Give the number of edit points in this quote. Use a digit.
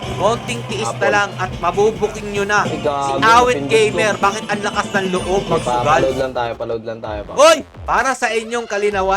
1